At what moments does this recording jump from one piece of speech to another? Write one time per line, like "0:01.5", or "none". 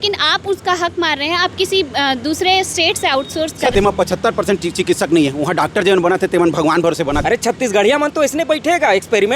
0:03.7
0:07.2